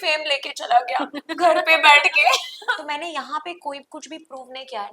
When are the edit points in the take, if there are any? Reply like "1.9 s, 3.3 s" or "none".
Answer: 2.5 s